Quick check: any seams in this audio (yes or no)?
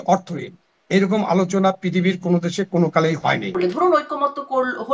yes